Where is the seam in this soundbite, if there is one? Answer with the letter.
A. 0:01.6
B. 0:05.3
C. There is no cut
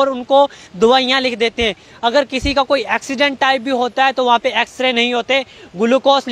C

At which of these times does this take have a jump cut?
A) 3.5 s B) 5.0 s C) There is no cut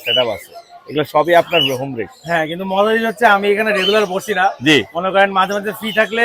C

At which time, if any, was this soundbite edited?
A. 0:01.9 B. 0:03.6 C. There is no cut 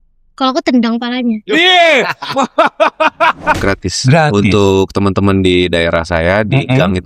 B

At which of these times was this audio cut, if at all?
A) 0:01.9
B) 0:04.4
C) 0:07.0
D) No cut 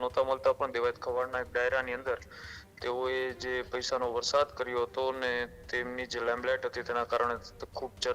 D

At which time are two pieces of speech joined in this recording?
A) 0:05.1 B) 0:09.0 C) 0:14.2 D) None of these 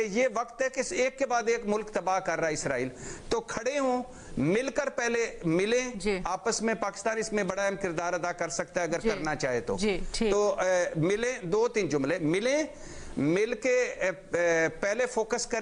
D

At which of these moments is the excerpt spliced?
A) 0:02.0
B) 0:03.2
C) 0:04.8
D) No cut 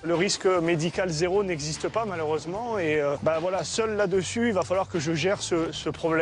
B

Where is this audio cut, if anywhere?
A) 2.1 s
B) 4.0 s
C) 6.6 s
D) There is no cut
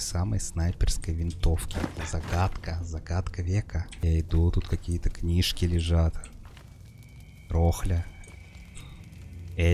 B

